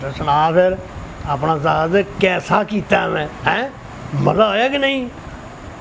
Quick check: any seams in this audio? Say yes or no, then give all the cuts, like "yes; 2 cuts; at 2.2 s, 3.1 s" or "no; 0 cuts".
no; 0 cuts